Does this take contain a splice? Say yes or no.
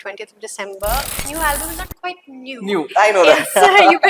yes